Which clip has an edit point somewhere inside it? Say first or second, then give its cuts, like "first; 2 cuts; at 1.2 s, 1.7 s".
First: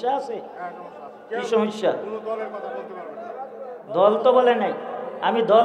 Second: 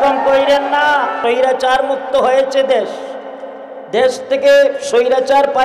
second; 1 cut; at 1.2 s